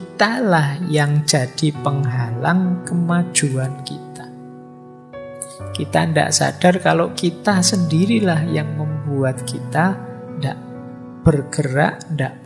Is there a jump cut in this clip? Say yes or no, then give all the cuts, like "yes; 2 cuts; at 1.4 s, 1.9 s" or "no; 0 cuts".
no; 0 cuts